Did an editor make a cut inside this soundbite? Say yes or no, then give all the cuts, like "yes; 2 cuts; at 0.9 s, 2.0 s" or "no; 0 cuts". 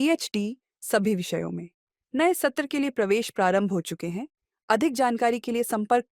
no; 0 cuts